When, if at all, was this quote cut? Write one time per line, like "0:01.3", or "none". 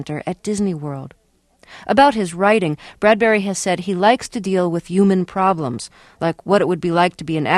0:01.5

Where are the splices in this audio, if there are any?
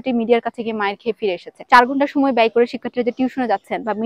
0:01.6

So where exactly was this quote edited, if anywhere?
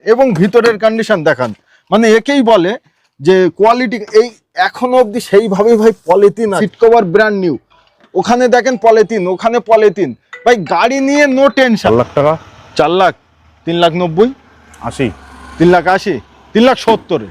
0:06.6
0:11.8

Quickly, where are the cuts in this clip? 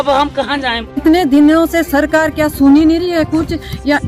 0:00.9

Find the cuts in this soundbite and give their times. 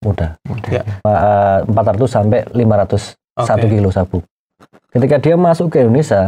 0:01.1

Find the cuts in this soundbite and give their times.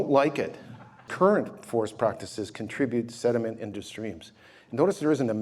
0:01.1

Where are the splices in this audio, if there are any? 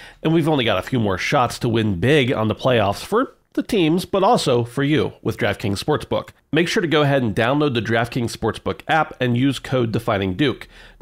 0:06.4

